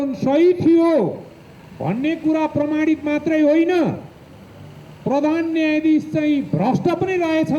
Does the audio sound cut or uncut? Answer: uncut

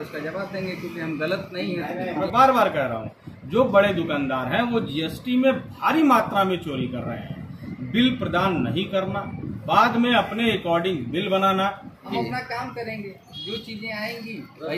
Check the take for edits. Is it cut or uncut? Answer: cut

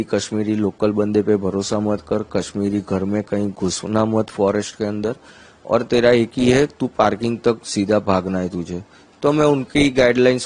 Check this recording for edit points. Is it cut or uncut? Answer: uncut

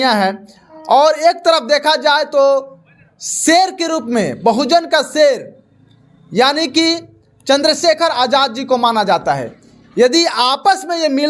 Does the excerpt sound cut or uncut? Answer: uncut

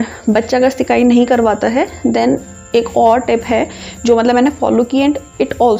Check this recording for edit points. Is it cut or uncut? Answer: uncut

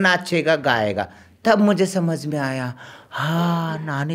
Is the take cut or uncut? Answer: uncut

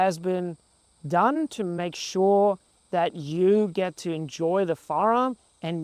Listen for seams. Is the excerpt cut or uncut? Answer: cut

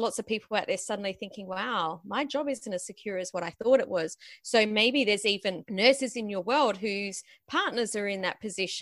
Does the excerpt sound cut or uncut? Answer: uncut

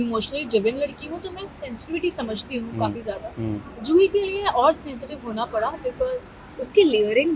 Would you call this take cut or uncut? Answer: uncut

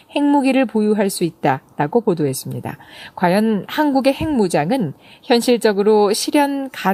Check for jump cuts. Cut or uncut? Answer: uncut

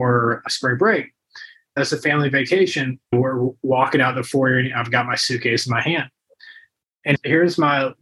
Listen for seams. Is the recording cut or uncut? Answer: cut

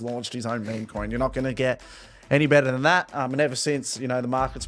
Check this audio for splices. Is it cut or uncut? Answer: uncut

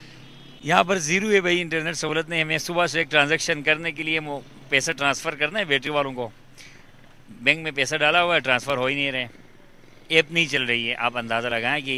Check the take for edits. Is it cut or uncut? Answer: uncut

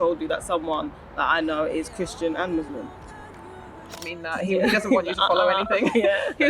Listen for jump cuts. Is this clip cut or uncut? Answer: cut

